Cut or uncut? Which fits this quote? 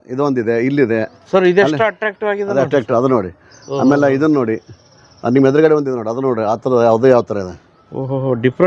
uncut